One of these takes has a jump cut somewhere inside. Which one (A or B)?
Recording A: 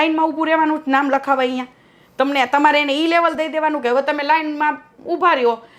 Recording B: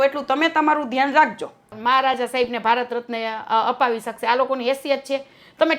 B